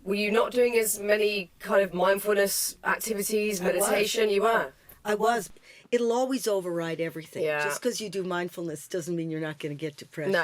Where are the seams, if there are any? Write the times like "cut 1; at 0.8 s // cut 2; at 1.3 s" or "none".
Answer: cut 1; at 5.4 s